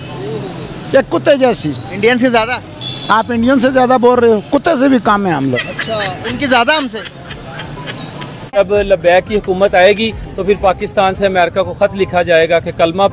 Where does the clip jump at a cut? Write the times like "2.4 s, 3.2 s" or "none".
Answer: 5.6 s, 8.6 s